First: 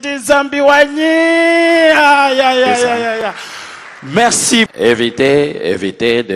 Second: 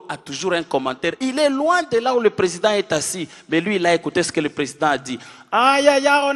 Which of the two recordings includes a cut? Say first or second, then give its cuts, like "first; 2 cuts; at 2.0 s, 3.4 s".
first; 1 cut; at 4.7 s